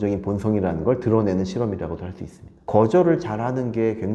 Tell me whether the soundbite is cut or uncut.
cut